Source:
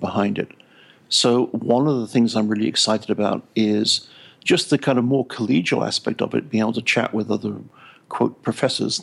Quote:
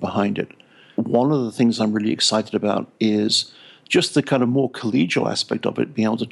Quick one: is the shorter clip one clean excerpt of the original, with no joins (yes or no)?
no